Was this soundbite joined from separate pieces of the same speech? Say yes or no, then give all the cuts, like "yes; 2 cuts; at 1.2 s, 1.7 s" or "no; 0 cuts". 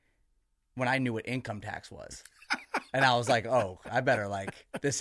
no; 0 cuts